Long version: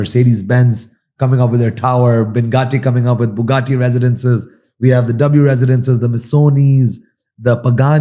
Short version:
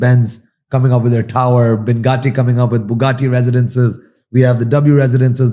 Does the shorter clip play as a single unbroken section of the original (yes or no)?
yes